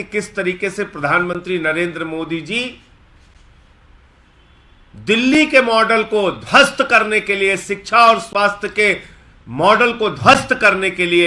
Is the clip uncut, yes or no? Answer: yes